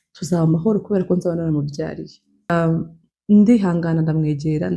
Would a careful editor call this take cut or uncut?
cut